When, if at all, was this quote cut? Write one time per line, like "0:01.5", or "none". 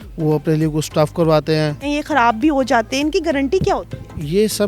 0:01.8